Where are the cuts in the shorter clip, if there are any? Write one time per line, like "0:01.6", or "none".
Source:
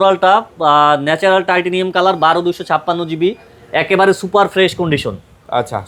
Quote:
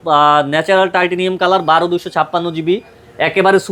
none